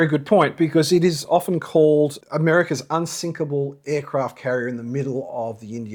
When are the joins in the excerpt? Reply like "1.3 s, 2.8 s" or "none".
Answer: none